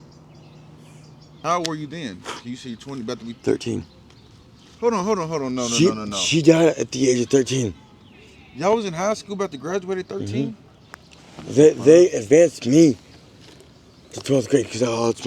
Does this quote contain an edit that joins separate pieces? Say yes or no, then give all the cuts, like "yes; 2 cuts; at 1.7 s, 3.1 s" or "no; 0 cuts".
yes; 1 cut; at 1.2 s